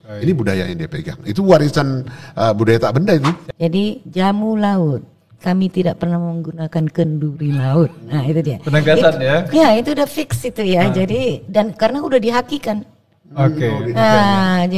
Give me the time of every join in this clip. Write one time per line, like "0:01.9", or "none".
0:03.4